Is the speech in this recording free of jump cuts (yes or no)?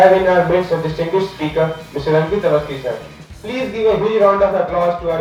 yes